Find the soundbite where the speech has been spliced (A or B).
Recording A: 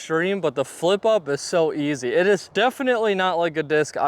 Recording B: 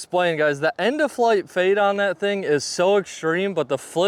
A